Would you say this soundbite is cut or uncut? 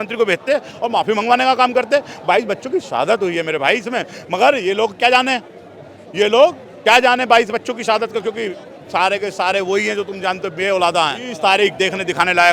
cut